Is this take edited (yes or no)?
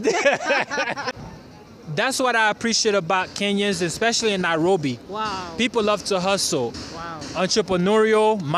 yes